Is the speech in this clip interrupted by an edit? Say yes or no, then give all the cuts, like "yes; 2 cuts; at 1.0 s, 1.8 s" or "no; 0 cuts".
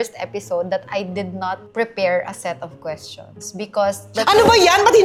no; 0 cuts